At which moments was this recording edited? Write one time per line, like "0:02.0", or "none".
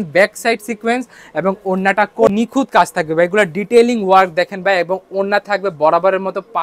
0:02.3